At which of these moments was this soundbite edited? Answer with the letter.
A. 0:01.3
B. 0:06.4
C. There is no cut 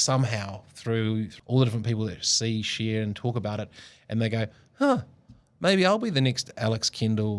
A